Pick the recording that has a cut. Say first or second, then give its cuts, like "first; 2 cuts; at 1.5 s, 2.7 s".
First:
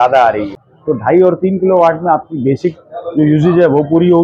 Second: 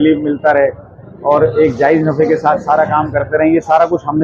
first; 1 cut; at 1.2 s